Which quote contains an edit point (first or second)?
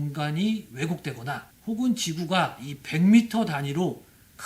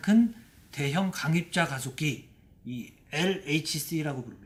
first